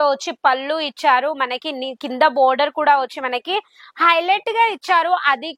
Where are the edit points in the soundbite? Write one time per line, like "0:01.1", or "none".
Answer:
none